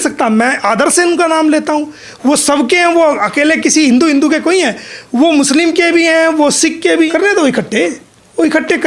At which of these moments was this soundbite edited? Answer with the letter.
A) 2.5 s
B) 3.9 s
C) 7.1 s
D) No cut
C